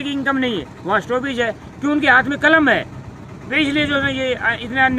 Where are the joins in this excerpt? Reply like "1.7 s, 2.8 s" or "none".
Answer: none